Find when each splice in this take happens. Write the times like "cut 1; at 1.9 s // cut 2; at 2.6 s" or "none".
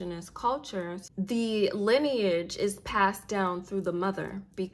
cut 1; at 1.1 s